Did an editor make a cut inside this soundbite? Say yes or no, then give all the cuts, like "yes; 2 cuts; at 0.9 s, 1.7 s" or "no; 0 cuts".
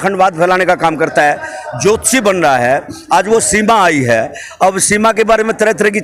no; 0 cuts